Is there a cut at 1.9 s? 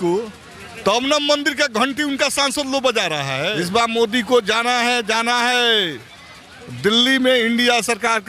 no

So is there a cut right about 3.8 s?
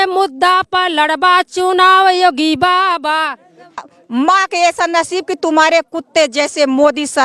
yes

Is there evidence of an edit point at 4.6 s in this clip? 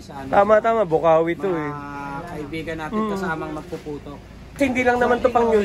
yes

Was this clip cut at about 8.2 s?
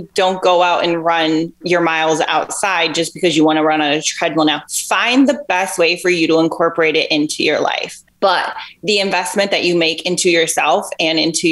no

